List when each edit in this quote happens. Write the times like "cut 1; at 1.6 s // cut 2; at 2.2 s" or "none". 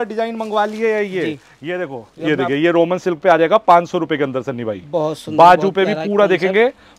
cut 1; at 2.1 s